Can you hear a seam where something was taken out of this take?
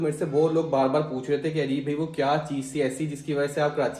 no; 0 cuts

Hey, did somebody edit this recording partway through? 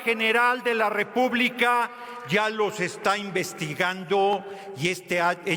no; 0 cuts

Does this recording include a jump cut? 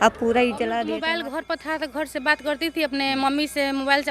yes; 1 cut; at 0.9 s

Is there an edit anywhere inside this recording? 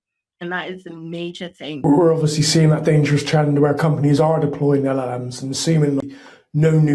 yes; 2 cuts; at 1.9 s, 6.0 s

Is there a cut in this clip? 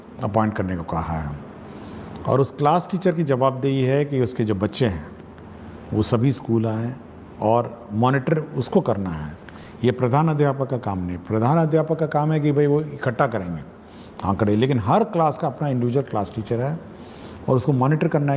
no; 0 cuts

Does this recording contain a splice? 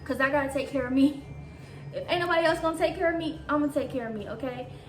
no; 0 cuts

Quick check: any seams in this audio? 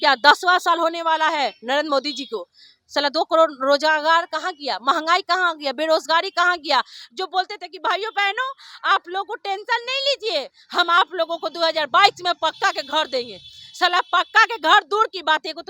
no; 0 cuts

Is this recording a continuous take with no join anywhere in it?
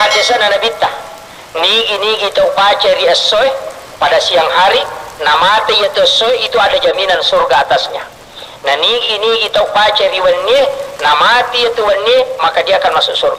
yes; 0 cuts

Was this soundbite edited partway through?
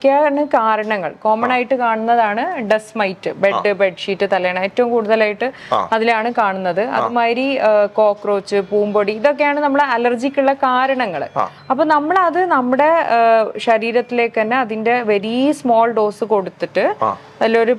no; 0 cuts

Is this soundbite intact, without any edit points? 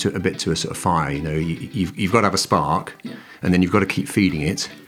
yes; 0 cuts

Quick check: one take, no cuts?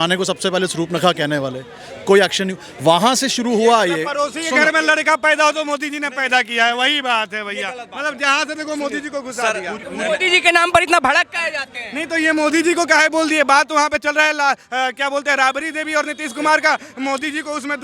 yes; 0 cuts

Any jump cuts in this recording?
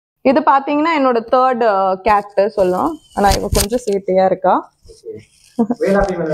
no; 0 cuts

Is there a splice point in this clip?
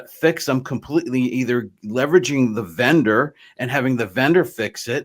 no; 0 cuts

